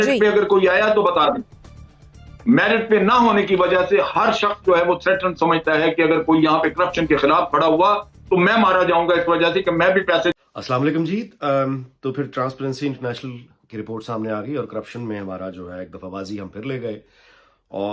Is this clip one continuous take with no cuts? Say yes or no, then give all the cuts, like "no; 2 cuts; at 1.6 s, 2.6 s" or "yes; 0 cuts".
yes; 0 cuts